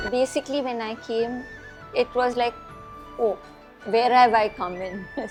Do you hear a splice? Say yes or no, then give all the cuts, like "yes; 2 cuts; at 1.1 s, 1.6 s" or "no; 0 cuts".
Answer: no; 0 cuts